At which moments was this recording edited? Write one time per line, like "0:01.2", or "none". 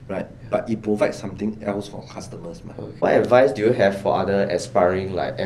0:03.0